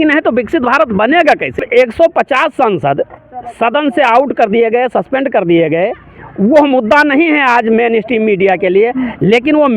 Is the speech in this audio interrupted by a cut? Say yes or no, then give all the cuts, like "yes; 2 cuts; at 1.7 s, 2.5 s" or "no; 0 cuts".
yes; 1 cut; at 1.6 s